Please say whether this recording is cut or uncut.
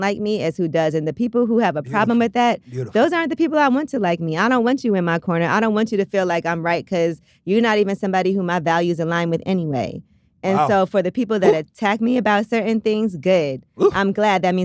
uncut